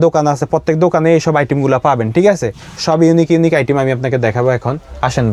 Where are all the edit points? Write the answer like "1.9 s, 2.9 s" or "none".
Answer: none